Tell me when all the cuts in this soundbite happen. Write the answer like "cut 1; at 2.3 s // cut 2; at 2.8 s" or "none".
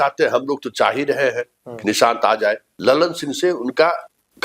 cut 1; at 2.7 s